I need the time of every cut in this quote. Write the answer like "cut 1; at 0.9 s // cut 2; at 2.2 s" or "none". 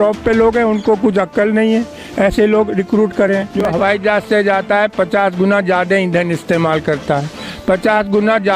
cut 1; at 3.3 s